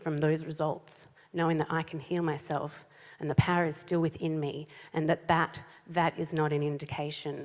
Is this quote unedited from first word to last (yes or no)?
yes